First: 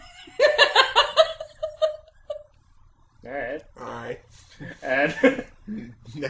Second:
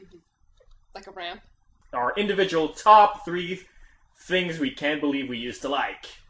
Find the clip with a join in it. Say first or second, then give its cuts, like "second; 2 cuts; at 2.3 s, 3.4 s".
first; 1 cut; at 2.1 s